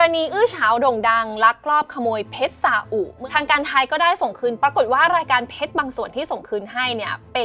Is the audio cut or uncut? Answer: cut